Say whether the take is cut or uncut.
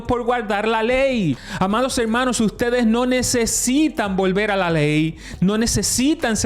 cut